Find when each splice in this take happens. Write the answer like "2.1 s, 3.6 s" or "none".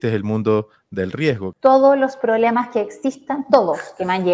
1.5 s